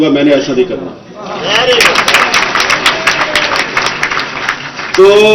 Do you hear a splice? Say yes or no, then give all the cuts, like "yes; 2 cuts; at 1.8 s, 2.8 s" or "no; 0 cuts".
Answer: no; 0 cuts